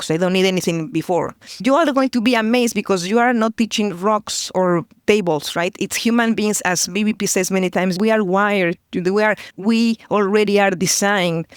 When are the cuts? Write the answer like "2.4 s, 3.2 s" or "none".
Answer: 1.6 s, 7.9 s